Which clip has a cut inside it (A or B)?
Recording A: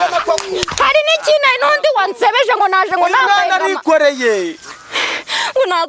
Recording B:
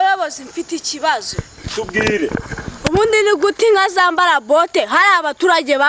A